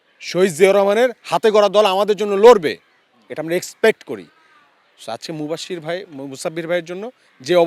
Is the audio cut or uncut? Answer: uncut